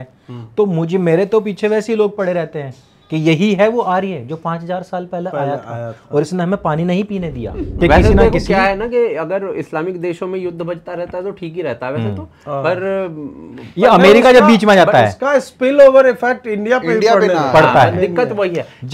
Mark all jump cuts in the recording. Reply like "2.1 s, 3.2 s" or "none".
7.6 s